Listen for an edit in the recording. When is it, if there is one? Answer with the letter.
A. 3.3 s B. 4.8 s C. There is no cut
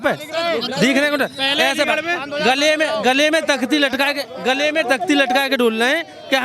C